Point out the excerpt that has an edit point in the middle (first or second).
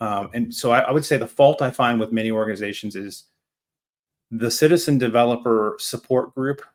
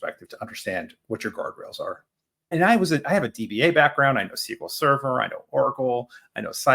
second